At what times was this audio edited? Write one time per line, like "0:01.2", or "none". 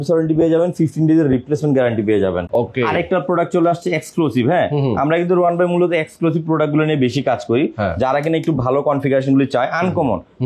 none